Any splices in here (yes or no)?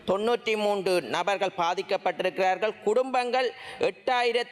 no